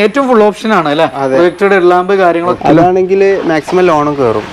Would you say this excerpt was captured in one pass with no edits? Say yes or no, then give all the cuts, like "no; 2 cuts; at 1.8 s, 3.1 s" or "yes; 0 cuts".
no; 1 cut; at 2.6 s